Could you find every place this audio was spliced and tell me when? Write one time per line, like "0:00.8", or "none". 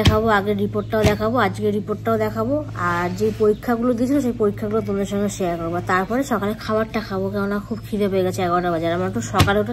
none